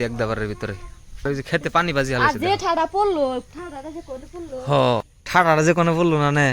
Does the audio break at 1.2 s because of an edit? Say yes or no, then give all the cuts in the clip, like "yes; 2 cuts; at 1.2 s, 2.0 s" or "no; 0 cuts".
yes; 2 cuts; at 1.2 s, 5.2 s